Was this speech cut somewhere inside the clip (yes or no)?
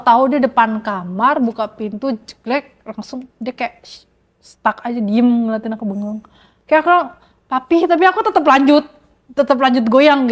no